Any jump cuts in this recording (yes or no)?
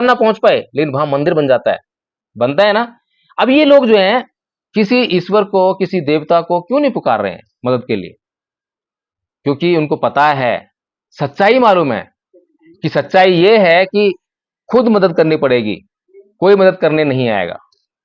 no